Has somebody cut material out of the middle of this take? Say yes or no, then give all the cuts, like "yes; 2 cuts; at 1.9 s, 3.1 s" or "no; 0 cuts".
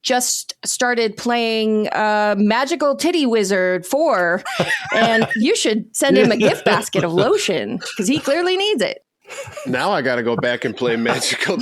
no; 0 cuts